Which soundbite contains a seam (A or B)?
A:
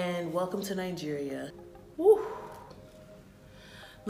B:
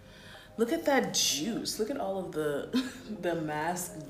A